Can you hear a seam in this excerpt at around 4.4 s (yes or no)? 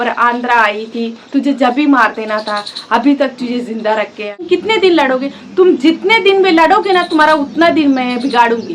yes